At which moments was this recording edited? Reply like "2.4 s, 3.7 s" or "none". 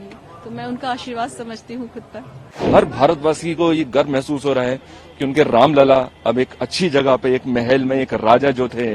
2.6 s